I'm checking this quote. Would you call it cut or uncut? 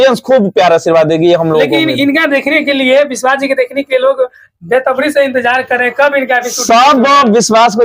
uncut